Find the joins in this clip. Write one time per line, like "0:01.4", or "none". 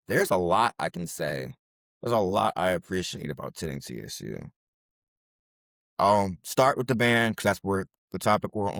none